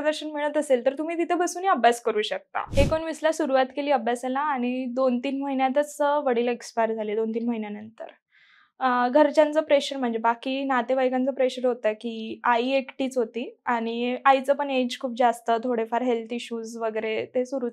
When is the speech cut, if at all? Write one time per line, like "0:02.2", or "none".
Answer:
0:02.6